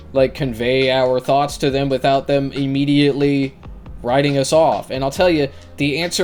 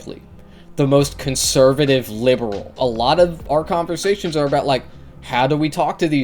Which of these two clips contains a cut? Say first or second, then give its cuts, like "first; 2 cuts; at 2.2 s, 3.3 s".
second; 1 cut; at 2.8 s